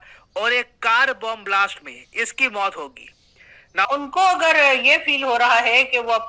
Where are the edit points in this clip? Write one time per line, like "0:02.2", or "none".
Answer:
0:03.8